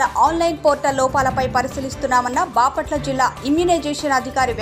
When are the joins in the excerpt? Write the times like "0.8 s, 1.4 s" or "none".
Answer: none